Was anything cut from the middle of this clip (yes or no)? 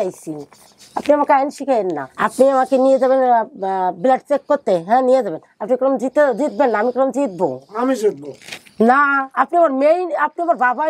yes